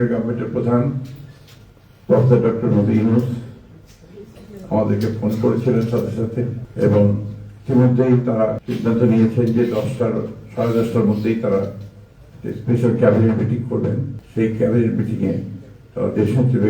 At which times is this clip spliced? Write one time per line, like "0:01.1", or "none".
0:08.7
0:14.2

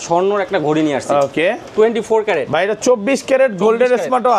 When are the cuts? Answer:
none

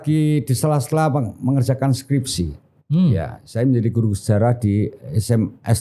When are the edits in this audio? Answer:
none

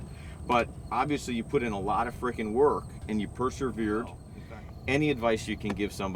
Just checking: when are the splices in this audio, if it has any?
0:04.3

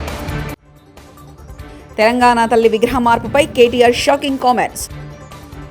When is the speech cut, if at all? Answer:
0:01.5
0:04.8

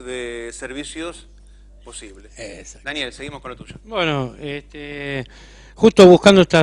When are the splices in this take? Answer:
0:03.8

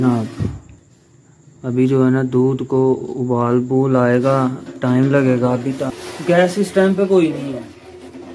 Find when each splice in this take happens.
0:05.9

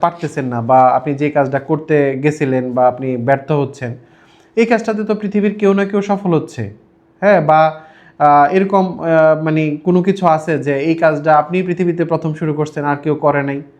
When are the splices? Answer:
none

